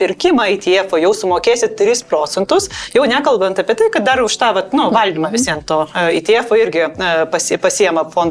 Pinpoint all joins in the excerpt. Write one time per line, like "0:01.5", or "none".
none